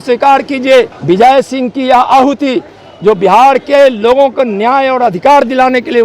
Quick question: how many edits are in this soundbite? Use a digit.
1